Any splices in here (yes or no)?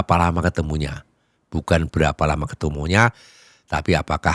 no